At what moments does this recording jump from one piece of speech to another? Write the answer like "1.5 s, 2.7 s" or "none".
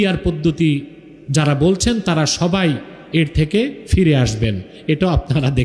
none